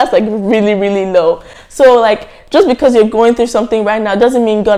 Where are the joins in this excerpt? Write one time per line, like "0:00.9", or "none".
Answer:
none